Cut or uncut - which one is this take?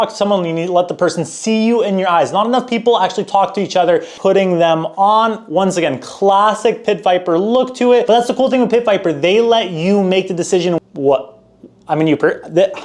cut